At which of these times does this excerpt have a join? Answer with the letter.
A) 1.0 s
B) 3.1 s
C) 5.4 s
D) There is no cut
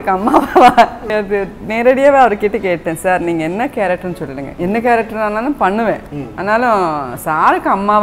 A